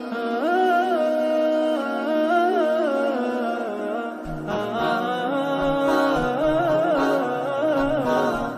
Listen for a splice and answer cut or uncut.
uncut